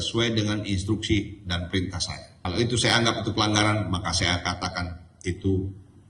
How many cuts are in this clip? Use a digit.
1